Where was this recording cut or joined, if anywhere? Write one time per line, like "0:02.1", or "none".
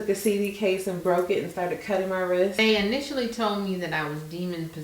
0:02.6

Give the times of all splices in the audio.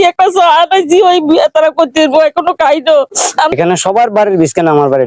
0:03.5

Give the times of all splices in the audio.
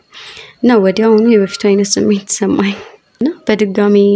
none

